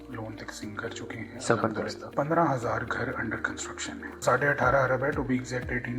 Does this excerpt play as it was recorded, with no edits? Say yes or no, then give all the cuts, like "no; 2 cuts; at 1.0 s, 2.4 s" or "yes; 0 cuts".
no; 2 cuts; at 2.0 s, 4.2 s